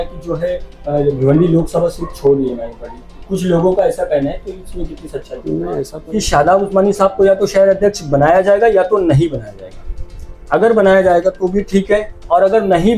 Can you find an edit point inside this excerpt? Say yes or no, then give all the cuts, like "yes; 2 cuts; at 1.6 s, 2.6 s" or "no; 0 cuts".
yes; 2 cuts; at 3.1 s, 5.9 s